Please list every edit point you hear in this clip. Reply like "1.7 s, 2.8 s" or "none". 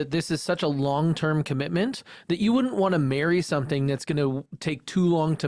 none